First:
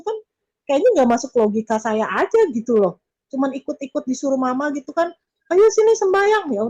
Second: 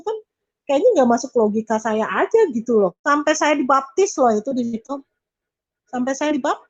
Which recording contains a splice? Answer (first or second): second